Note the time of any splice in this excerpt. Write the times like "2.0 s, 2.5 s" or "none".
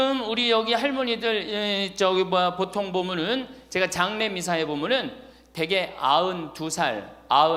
none